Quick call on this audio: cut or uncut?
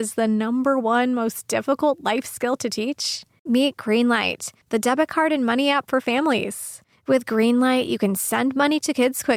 uncut